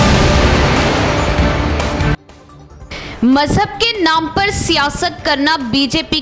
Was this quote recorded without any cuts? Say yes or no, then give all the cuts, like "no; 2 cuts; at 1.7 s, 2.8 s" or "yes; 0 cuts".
no; 1 cut; at 2.0 s